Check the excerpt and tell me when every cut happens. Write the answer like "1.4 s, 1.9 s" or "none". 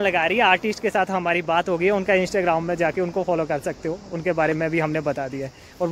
none